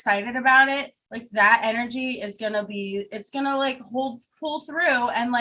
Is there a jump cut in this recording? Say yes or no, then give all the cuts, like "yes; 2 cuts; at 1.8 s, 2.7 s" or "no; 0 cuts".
no; 0 cuts